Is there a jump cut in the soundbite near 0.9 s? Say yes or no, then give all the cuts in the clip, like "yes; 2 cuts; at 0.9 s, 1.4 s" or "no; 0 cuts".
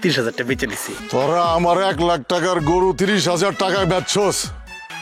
yes; 1 cut; at 0.9 s